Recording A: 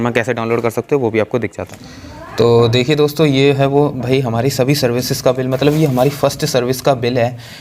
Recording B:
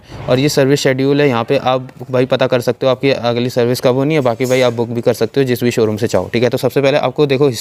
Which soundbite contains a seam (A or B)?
A